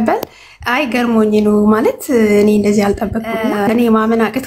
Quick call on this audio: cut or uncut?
cut